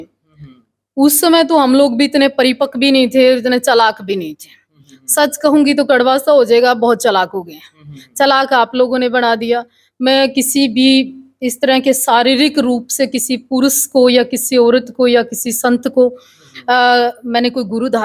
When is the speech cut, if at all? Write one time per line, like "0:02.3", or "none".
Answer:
none